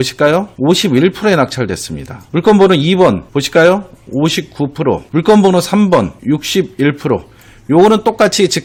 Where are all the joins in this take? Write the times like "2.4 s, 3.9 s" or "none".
none